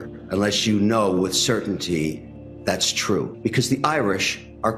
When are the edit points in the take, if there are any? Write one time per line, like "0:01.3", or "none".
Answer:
0:03.3